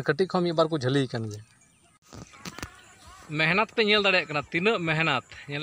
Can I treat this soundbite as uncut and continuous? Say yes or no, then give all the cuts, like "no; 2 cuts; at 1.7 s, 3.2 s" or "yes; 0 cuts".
no; 1 cut; at 2.1 s